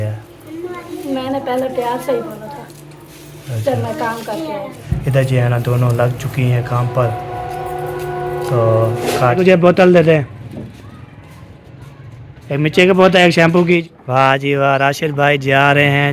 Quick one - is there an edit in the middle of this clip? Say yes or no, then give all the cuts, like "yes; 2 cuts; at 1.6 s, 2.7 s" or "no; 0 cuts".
yes; 3 cuts; at 4.8 s, 9.4 s, 13.8 s